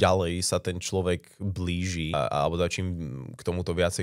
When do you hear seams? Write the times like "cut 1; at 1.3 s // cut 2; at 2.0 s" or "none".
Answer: cut 1; at 2.1 s